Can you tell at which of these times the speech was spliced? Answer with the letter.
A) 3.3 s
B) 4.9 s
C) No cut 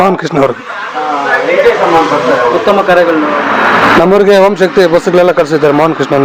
A